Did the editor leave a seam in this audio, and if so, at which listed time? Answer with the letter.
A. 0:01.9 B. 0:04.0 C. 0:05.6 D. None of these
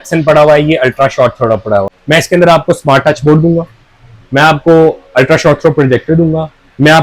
A